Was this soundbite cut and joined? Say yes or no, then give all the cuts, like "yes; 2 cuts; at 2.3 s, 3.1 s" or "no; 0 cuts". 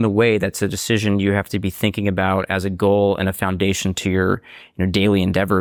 no; 0 cuts